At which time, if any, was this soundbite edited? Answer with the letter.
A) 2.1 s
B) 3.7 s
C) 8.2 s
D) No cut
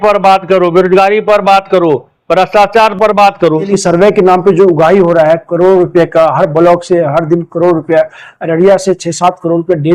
B